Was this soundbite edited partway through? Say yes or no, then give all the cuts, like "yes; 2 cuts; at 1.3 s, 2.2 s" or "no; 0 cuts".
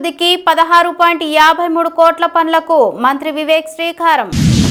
no; 0 cuts